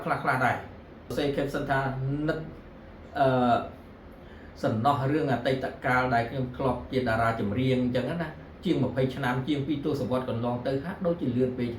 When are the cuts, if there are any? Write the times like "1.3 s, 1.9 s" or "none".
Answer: 1.1 s